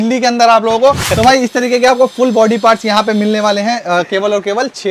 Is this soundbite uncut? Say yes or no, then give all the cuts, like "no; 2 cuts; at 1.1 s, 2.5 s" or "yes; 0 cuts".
no; 1 cut; at 1.1 s